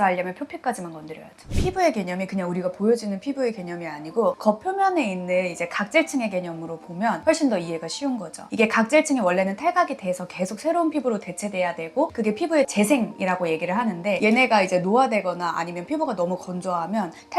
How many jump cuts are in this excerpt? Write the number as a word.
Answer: four